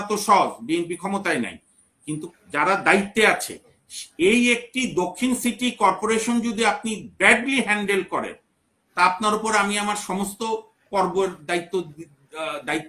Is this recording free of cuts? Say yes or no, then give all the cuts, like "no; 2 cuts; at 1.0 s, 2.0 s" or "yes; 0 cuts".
yes; 0 cuts